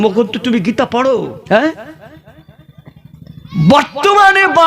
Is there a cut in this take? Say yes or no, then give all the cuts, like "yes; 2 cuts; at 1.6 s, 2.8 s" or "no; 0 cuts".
yes; 1 cut; at 1.3 s